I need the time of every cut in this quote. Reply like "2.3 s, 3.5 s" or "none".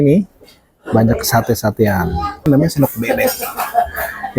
2.5 s